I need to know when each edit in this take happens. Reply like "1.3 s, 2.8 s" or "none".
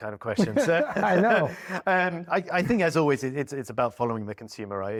none